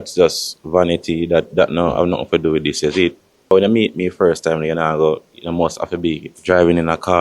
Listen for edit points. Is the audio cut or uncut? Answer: cut